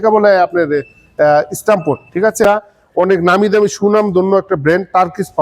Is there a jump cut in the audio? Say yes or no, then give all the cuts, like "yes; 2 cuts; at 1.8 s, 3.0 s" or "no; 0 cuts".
yes; 1 cut; at 2.4 s